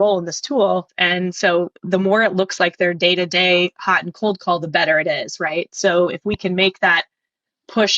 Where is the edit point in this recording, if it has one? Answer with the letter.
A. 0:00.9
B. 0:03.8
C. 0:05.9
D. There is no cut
A